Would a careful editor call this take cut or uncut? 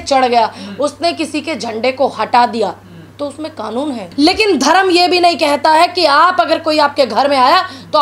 cut